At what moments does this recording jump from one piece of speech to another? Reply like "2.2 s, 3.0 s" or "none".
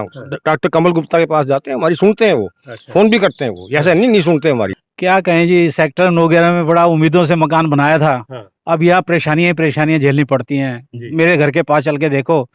4.8 s